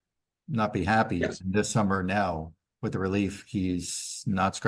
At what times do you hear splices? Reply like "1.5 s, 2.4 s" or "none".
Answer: none